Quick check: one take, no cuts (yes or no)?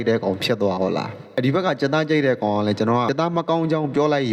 no